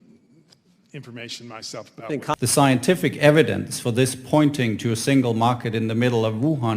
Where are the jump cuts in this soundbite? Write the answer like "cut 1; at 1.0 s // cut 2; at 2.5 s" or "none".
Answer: cut 1; at 2.3 s